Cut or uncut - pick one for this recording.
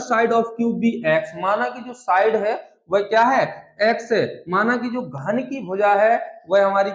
uncut